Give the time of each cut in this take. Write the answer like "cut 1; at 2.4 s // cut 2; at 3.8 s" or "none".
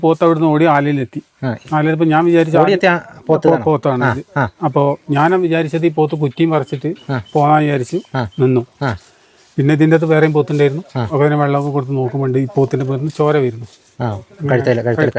none